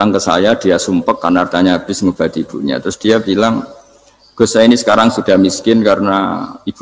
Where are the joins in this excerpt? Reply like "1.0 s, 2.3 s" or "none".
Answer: none